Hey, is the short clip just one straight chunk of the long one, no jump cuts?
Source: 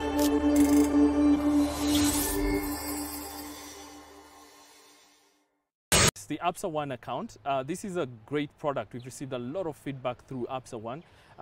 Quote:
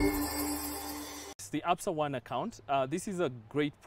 no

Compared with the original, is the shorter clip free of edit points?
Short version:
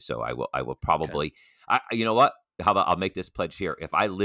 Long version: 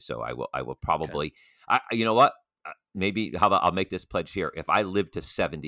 no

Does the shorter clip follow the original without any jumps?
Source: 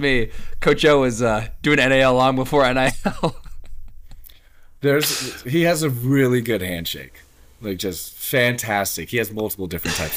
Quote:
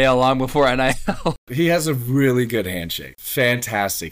no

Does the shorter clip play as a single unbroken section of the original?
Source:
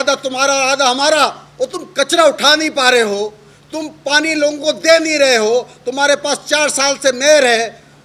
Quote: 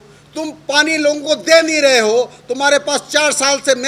yes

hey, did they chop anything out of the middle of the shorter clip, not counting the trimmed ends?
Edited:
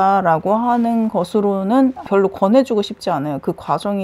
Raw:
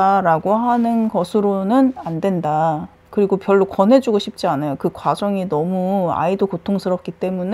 yes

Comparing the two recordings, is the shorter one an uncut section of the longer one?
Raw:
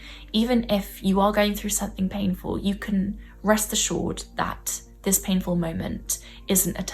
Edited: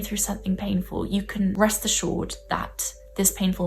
no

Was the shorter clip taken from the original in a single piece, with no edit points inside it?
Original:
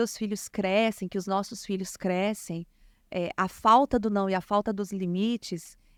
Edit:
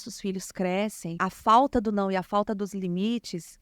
no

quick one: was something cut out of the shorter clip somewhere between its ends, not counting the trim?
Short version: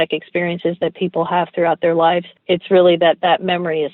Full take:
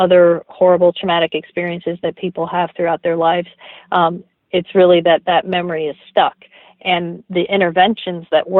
yes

